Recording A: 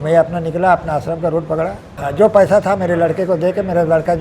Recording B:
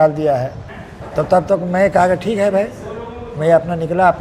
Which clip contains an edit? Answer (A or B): A